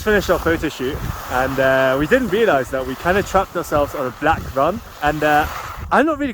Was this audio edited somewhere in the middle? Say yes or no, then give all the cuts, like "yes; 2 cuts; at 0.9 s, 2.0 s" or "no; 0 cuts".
yes; 2 cuts; at 1.1 s, 4.9 s